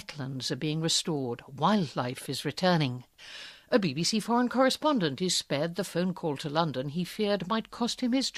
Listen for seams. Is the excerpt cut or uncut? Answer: uncut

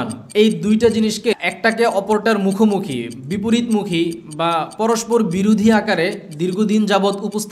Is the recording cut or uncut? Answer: cut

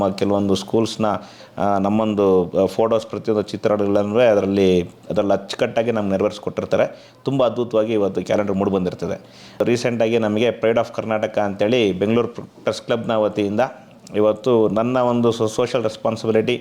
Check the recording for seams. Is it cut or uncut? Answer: cut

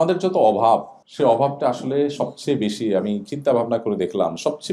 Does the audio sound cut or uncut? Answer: cut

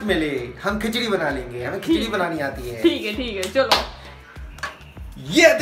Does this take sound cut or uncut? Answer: cut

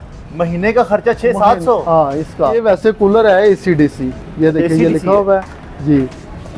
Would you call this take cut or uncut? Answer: cut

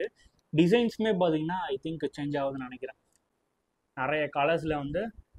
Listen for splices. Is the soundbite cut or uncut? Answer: cut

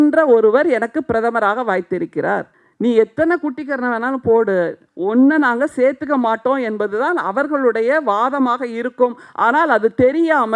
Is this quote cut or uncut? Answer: cut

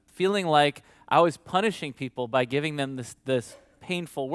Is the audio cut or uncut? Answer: uncut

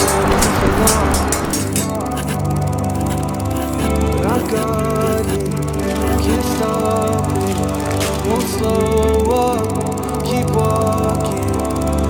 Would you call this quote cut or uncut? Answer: uncut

